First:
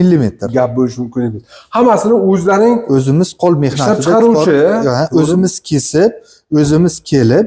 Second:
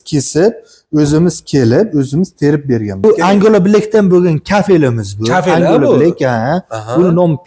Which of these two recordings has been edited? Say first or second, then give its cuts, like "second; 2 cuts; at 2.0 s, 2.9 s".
second; 1 cut; at 3.0 s